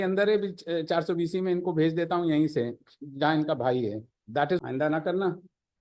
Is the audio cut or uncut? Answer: cut